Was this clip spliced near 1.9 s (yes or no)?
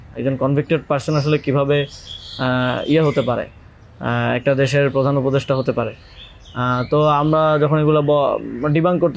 no